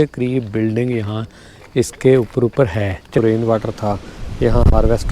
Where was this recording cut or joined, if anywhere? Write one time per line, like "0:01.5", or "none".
0:03.2